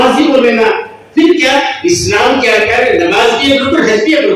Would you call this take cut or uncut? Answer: uncut